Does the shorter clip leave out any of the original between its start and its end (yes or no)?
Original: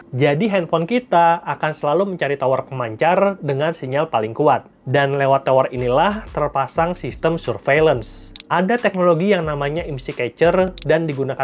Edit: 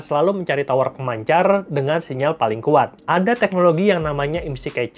yes